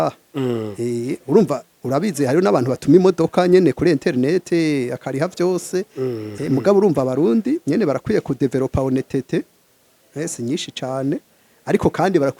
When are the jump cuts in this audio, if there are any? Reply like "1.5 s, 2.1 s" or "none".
6.3 s